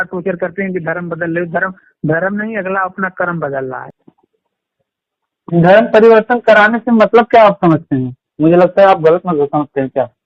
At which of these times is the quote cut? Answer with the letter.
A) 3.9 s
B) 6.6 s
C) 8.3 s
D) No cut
A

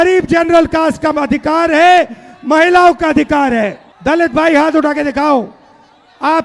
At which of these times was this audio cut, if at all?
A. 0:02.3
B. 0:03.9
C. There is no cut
B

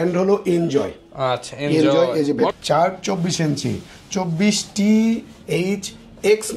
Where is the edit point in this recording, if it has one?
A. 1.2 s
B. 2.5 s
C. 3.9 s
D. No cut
B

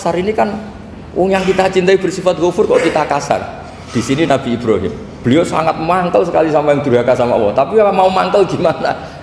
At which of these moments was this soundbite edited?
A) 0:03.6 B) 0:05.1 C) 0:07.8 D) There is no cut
B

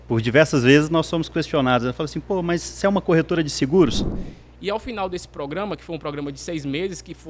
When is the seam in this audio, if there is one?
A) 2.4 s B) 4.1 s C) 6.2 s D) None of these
B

